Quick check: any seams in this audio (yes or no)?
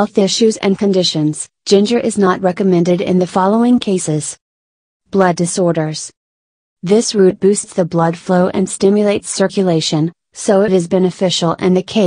no